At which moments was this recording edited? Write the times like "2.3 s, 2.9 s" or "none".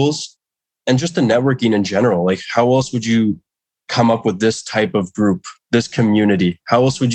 none